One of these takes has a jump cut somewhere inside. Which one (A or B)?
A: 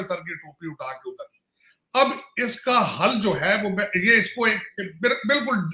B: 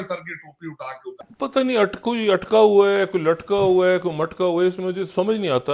B